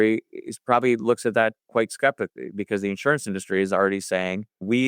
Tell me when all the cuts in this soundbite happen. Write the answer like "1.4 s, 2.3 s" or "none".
2.7 s